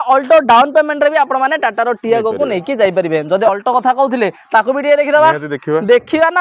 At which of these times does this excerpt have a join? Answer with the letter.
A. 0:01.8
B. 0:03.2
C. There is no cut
C